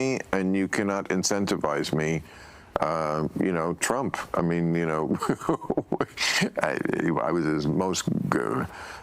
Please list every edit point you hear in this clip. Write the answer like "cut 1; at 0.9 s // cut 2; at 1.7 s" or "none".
none